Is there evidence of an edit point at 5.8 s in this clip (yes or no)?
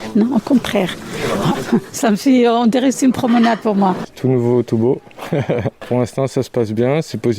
yes